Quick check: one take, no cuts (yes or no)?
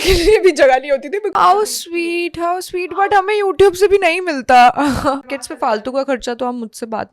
no